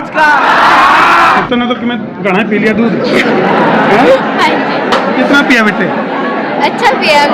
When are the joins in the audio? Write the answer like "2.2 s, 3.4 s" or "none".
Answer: 1.3 s